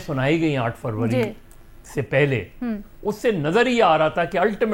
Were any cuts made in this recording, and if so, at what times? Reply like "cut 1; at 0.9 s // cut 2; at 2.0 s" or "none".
none